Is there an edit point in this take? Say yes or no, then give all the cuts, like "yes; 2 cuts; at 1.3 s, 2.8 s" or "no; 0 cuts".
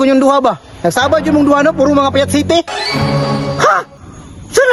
no; 0 cuts